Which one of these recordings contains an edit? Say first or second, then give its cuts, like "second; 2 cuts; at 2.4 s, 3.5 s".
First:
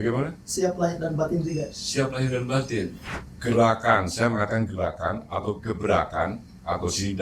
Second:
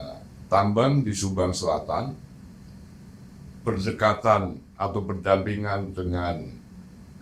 first; 1 cut; at 3.0 s